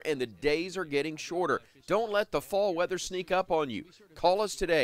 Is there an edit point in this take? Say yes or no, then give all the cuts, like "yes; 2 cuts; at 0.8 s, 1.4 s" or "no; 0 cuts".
no; 0 cuts